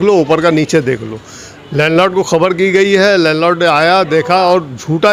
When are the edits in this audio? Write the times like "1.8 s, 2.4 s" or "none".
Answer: none

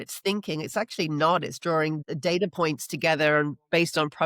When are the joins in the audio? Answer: 2.1 s

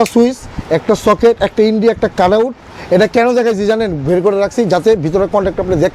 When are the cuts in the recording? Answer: none

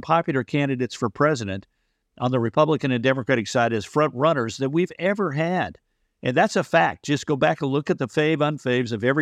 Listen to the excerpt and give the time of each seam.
none

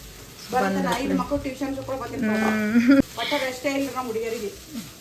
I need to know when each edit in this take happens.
3.0 s

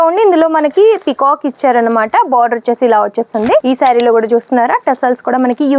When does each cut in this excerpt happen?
3.6 s

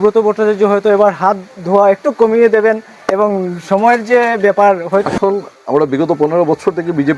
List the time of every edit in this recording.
5.1 s

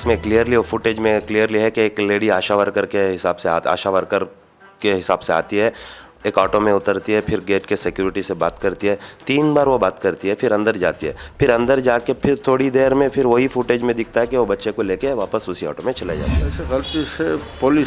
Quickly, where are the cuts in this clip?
16.5 s

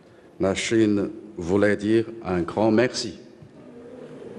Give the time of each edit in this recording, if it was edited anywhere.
1.4 s

